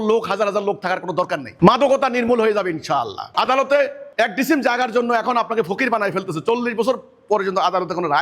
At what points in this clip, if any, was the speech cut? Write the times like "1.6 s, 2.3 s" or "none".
none